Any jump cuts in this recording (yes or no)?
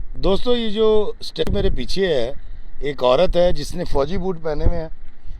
yes